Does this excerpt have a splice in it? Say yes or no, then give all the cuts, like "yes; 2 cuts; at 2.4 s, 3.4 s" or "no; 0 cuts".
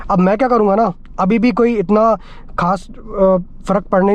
no; 0 cuts